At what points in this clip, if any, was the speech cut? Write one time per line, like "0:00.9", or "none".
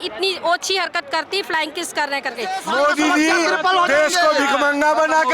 0:02.6